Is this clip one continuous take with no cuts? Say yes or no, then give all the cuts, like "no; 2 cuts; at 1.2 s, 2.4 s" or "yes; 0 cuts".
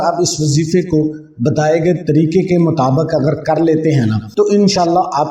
no; 1 cut; at 4.2 s